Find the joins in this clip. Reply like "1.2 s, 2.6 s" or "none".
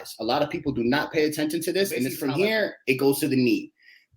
2.2 s